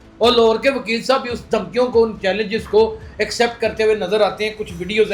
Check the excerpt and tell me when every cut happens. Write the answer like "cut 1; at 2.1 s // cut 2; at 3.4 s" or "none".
none